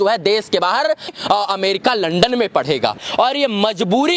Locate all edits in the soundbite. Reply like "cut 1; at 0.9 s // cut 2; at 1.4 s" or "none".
cut 1; at 1.1 s // cut 2; at 3.0 s